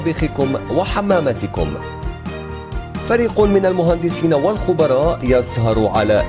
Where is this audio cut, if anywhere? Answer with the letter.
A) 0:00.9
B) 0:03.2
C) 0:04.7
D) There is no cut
D